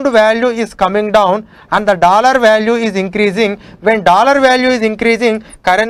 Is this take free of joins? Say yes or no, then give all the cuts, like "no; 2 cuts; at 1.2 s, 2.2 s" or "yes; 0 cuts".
yes; 0 cuts